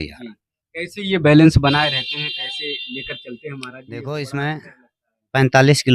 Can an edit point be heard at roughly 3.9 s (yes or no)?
yes